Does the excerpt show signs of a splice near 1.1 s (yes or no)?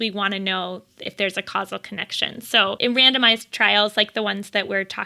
no